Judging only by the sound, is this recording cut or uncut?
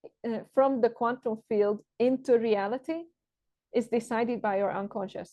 uncut